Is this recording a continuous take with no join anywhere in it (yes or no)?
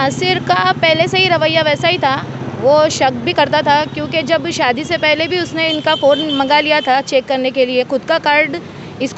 yes